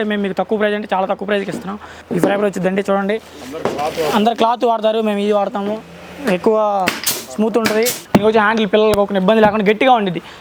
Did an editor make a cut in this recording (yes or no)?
yes